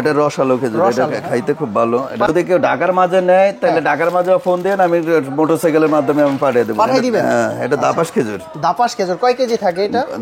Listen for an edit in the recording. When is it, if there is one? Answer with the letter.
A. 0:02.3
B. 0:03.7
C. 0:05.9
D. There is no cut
A